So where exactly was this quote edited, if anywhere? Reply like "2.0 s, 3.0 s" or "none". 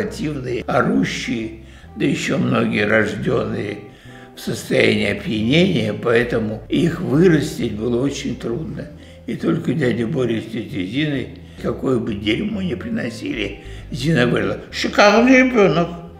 none